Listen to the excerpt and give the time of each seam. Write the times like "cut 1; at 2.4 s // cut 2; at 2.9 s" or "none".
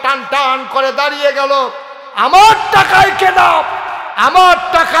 none